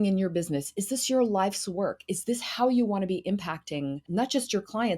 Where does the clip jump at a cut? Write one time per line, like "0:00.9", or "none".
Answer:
0:04.0